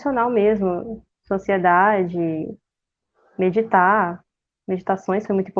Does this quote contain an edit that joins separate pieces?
no; 0 cuts

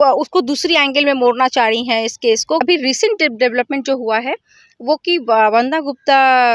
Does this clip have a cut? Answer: yes; 1 cut; at 2.6 s

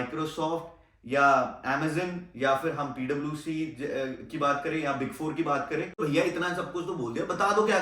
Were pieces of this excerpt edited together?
yes; 1 cut; at 6.0 s

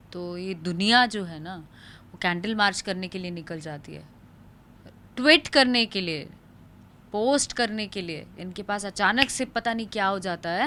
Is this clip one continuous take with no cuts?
yes; 0 cuts

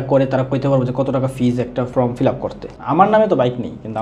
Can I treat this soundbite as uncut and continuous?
no; 2 cuts; at 1.9 s, 2.6 s

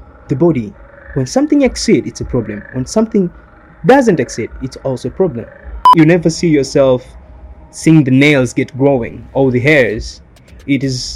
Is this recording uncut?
no; 1 cut; at 5.9 s

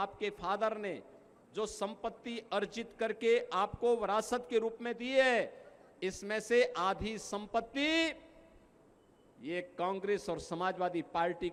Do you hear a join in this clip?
no; 0 cuts

